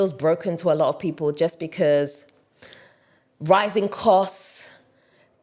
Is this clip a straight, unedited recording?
yes; 0 cuts

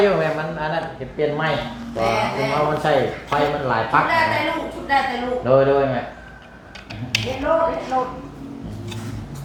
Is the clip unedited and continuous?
yes; 0 cuts

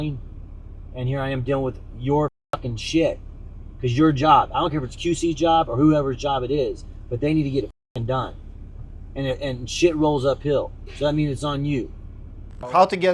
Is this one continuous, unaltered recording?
yes; 0 cuts

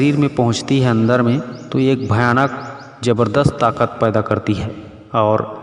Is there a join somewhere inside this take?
no; 0 cuts

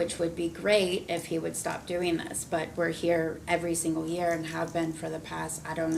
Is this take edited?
no; 0 cuts

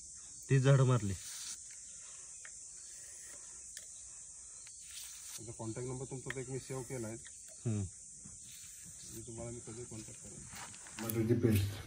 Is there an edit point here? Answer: yes; 1 cut; at 10.9 s

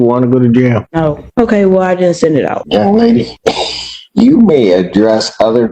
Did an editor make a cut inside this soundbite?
yes; 3 cuts; at 1.1 s, 2.6 s, 3.3 s

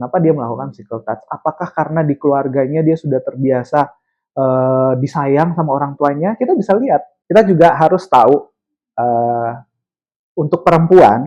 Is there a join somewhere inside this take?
yes; 1 cut; at 7.1 s

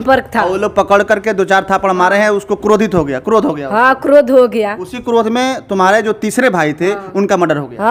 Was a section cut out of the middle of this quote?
no; 0 cuts

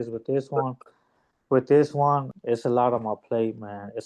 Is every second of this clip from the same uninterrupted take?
no; 1 cut; at 2.3 s

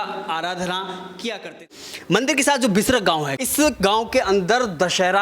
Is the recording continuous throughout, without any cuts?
no; 2 cuts; at 1.7 s, 3.3 s

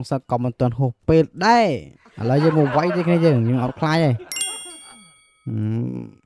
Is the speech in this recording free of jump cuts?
no; 1 cut; at 1.8 s

